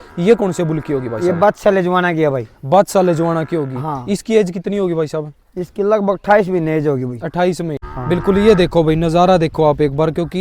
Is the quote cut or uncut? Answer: cut